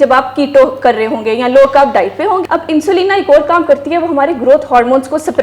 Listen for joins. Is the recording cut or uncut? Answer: cut